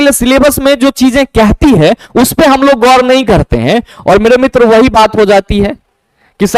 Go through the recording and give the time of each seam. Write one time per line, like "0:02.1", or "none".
none